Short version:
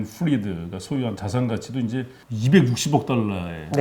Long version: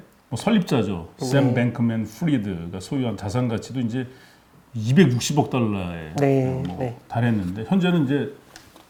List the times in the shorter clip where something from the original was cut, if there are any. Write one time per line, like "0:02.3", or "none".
0:02.2